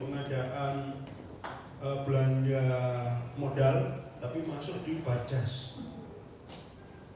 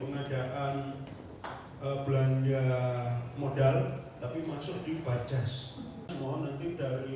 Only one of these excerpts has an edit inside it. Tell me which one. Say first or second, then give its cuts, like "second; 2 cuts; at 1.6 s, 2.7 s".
second; 1 cut; at 6.1 s